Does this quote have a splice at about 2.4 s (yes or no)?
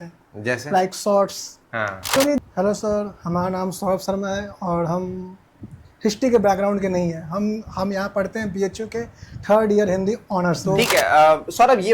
yes